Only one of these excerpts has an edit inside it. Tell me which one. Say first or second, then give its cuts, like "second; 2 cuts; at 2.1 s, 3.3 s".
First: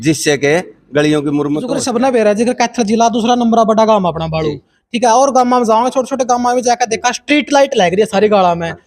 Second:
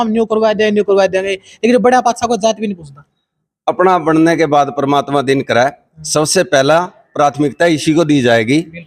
first; 1 cut; at 1.7 s